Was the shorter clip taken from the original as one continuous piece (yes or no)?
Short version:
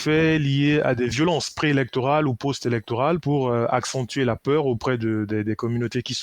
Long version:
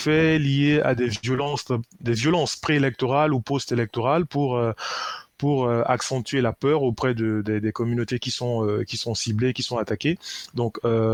no